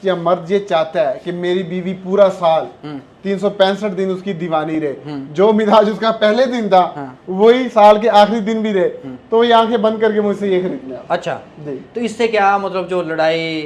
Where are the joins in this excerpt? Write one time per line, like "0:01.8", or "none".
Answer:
none